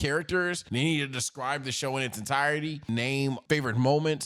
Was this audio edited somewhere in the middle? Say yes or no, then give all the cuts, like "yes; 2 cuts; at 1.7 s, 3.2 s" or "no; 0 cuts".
yes; 1 cut; at 2.9 s